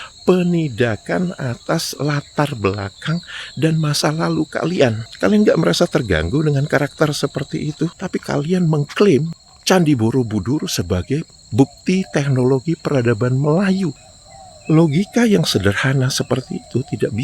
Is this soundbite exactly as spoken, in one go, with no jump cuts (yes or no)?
no